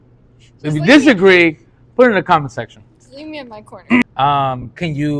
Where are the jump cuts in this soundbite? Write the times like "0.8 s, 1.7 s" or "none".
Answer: 4.0 s